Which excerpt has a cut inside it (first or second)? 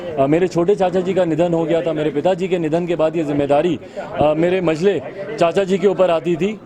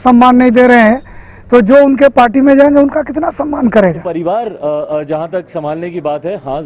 second